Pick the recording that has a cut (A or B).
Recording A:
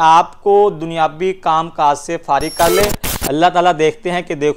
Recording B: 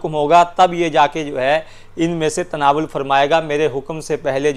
A